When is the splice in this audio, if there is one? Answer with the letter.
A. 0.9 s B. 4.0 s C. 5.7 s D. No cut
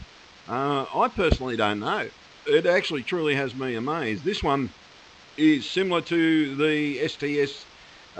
C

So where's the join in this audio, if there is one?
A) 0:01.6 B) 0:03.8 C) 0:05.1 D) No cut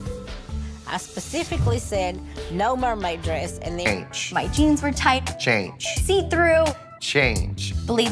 B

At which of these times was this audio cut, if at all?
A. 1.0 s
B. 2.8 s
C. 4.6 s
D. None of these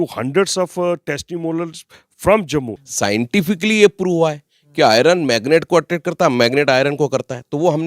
B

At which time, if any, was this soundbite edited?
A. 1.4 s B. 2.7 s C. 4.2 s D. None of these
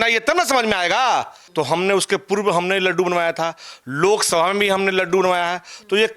A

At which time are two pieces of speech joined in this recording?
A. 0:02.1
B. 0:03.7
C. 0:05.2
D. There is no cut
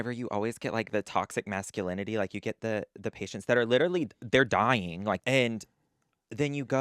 C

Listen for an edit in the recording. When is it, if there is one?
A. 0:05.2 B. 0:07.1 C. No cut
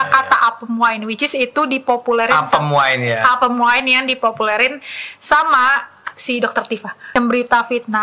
B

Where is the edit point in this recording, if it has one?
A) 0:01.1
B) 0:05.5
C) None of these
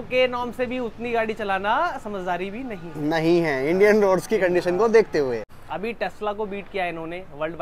B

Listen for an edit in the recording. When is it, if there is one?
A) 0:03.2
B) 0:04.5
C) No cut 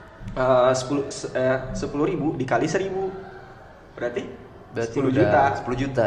C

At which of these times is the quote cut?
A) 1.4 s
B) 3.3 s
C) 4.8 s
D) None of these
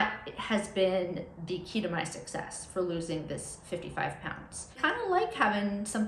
C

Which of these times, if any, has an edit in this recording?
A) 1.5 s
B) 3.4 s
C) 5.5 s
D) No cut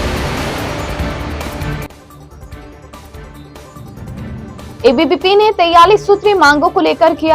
B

